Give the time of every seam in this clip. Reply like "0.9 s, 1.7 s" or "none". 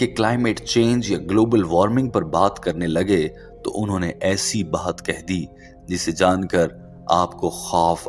none